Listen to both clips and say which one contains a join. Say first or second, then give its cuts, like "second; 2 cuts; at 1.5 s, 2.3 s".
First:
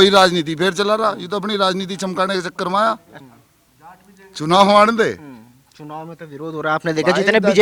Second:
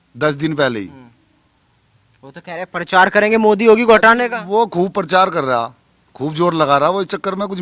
first; 1 cut; at 3.1 s